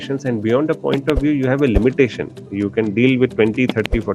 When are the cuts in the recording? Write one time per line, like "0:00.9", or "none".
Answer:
none